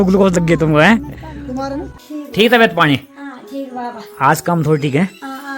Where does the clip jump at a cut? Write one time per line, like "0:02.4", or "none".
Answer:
0:01.9